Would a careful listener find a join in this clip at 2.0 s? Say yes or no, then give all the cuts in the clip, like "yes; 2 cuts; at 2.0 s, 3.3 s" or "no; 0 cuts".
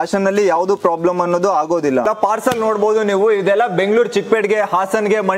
yes; 1 cut; at 2.0 s